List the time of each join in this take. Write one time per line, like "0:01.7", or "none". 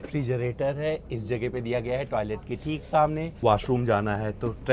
0:03.3